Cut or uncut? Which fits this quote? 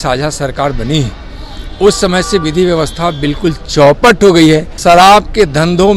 cut